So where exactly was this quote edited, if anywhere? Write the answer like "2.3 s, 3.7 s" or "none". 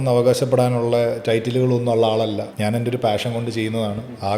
2.5 s